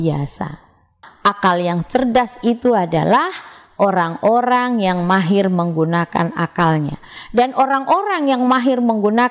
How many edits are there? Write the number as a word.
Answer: one